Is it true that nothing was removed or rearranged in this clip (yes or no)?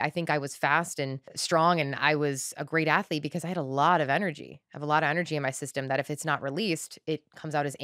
no